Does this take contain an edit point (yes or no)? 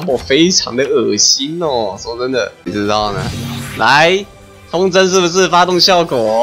yes